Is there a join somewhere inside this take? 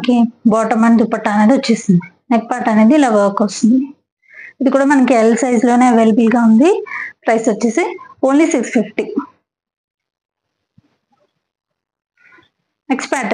no; 0 cuts

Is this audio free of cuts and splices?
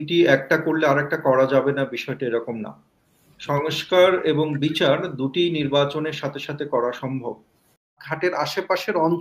no; 1 cut; at 8.0 s

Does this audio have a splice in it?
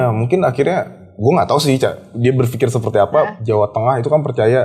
yes; 1 cut; at 3.4 s

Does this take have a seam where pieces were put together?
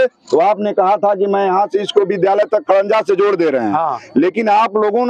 no; 0 cuts

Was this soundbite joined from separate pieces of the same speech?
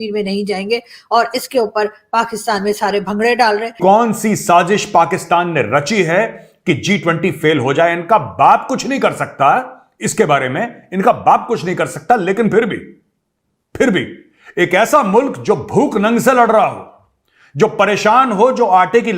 yes; 1 cut; at 3.8 s

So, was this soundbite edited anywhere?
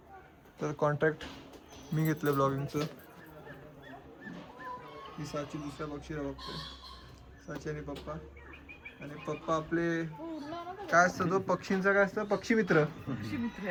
no; 0 cuts

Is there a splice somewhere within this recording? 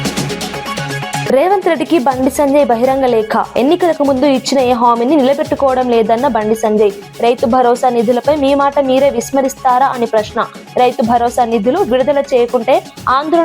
yes; 1 cut; at 1.1 s

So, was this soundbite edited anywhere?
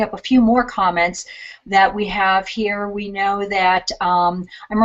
yes; 1 cut; at 3.6 s

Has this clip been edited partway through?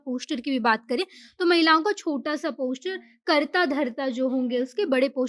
no; 0 cuts

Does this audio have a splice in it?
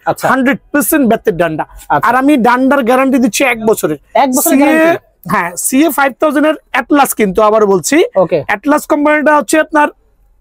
no; 0 cuts

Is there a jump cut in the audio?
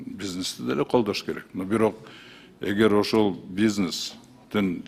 no; 0 cuts

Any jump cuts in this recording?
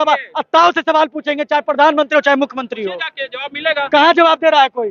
no; 0 cuts

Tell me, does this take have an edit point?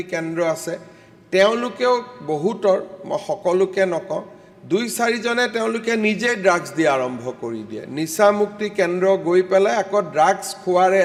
no; 0 cuts

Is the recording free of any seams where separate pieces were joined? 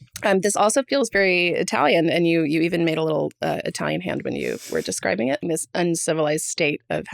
no; 1 cut; at 5.4 s

